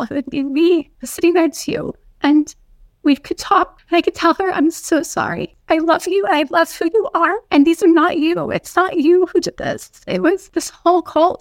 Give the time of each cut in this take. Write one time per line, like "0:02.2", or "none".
0:01.0
0:03.8
0:05.5
0:07.4
0:10.5